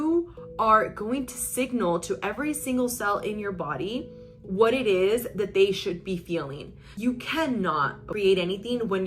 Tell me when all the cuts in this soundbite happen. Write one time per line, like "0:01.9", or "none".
0:06.9
0:08.1